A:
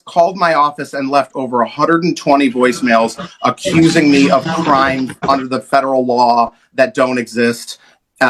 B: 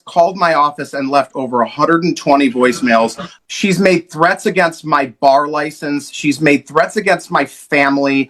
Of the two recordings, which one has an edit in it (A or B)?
B